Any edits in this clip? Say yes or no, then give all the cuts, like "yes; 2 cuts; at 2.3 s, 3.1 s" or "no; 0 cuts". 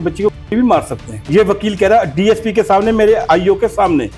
yes; 2 cuts; at 1.2 s, 3.2 s